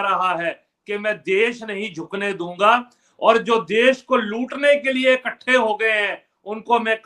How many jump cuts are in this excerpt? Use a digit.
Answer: 0